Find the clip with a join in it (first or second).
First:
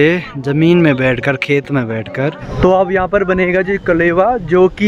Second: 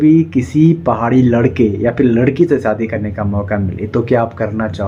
first